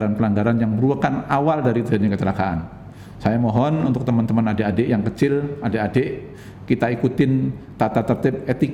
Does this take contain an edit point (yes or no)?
no